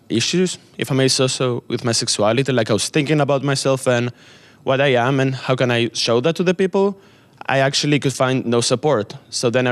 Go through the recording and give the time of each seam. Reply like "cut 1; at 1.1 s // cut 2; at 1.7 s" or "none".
cut 1; at 3.6 s